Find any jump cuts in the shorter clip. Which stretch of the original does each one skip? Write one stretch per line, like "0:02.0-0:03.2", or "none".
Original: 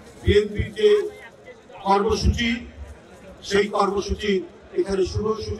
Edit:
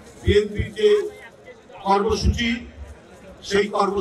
none